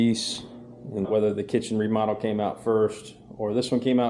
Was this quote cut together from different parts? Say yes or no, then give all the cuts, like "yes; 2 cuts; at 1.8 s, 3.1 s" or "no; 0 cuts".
yes; 1 cut; at 1.1 s